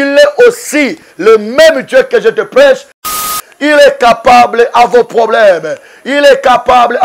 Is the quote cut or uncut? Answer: cut